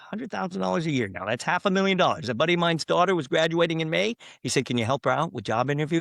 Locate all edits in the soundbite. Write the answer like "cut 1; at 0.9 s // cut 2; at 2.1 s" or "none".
none